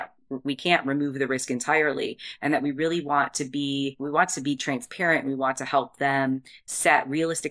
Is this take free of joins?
no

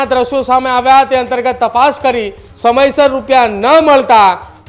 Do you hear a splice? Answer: yes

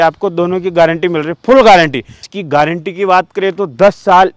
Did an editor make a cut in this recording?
yes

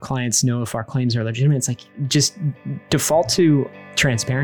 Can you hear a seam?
no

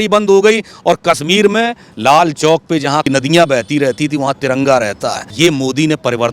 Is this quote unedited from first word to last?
no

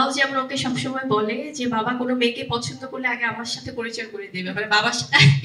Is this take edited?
no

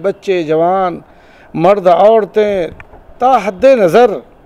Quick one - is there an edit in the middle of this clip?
no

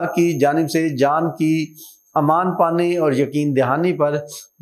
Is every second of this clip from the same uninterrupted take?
yes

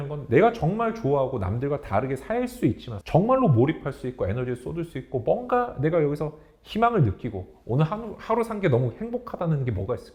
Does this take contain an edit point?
no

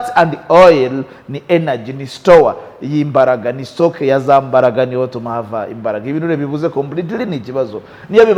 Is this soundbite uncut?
yes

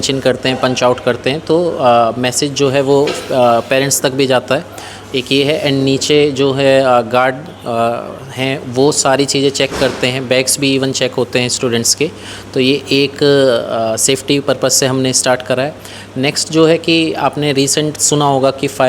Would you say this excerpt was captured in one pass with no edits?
yes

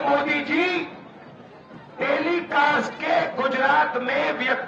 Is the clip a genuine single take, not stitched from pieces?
yes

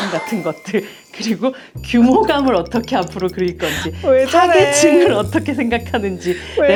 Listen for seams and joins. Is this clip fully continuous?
yes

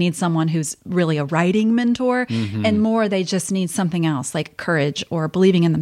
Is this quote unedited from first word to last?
yes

